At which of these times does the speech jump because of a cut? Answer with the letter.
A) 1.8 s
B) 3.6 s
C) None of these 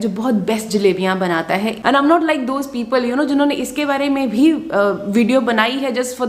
A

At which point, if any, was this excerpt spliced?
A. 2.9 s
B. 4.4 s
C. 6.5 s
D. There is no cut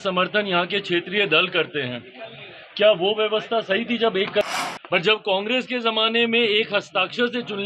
B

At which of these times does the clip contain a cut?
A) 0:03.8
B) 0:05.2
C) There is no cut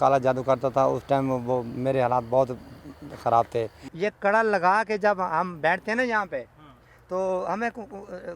A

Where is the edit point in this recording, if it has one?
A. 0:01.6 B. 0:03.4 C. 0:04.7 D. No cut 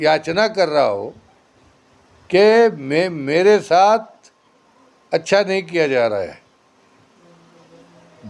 D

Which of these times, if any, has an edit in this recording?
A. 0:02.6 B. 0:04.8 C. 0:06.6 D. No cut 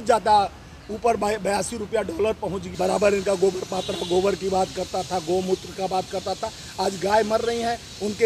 A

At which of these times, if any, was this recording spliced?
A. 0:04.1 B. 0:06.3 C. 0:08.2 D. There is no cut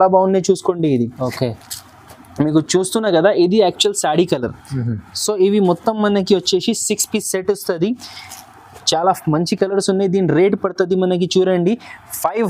D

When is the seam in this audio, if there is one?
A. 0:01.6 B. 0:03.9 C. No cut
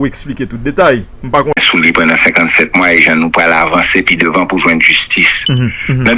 A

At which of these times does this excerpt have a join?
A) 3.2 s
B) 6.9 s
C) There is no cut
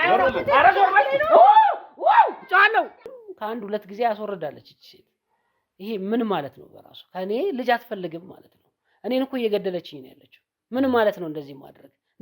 A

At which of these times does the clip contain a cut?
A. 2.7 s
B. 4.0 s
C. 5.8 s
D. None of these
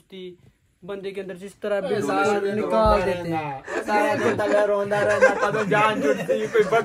D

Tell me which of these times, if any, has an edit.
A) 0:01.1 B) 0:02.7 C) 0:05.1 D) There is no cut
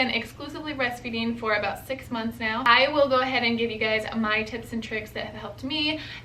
B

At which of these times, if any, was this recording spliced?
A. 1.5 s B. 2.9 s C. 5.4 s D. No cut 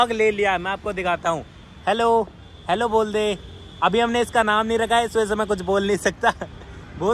D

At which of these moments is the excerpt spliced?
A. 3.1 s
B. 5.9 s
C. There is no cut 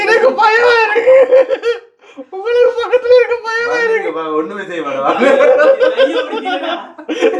C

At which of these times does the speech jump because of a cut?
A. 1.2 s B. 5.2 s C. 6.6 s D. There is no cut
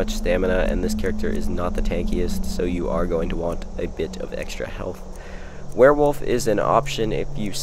B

